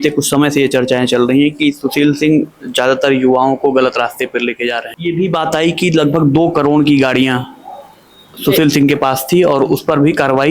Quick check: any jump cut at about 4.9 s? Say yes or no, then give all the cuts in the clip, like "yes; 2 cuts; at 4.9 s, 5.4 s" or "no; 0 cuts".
yes; 1 cut; at 4.9 s